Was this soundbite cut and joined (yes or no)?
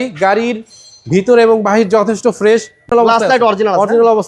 yes